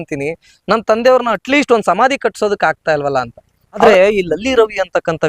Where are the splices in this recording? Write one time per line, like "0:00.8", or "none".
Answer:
0:03.8